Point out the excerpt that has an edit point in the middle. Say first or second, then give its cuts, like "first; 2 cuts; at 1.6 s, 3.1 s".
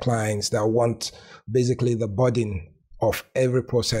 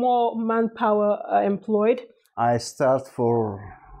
second; 1 cut; at 2.1 s